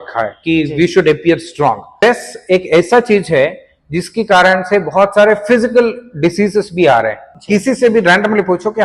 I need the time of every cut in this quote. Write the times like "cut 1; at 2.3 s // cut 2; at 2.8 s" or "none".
cut 1; at 1.9 s // cut 2; at 7.3 s